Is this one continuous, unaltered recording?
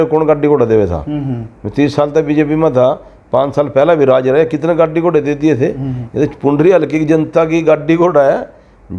yes; 0 cuts

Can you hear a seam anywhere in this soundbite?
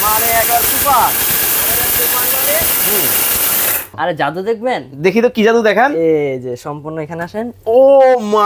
yes; 1 cut; at 3.9 s

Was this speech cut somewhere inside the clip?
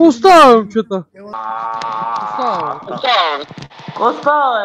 yes; 1 cut; at 1.2 s

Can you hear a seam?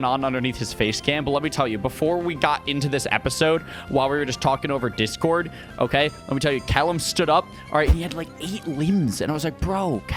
no; 0 cuts

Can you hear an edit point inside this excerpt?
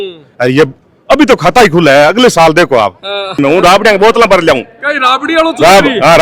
yes; 1 cut; at 3.3 s

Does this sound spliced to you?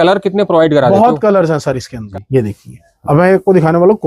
yes; 1 cut; at 1.9 s

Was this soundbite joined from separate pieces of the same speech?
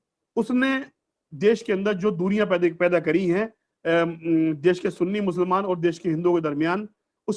no; 0 cuts

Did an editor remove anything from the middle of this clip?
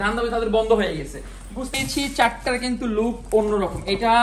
yes; 1 cut; at 1.7 s

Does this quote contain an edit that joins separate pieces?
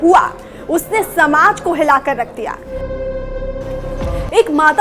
yes; 1 cut; at 3.8 s

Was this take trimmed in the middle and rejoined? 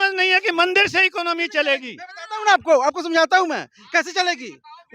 no; 0 cuts

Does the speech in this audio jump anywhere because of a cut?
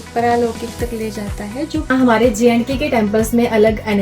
yes; 1 cut; at 1.9 s

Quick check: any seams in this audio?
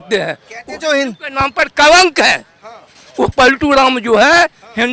no; 0 cuts

